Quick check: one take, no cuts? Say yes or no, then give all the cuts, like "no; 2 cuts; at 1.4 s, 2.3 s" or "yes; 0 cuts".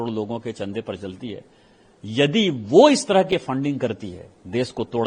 yes; 0 cuts